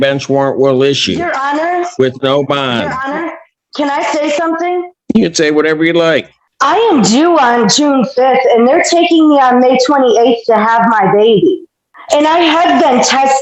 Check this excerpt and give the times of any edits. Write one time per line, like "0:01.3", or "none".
none